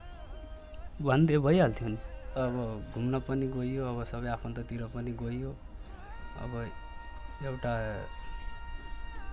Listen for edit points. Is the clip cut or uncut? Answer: cut